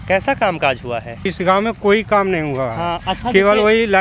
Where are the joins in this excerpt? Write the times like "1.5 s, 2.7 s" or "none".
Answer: 1.3 s